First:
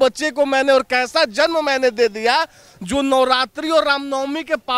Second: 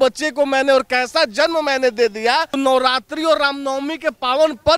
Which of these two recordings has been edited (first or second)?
second